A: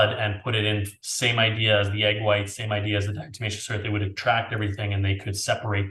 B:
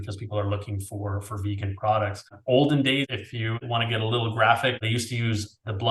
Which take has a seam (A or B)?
B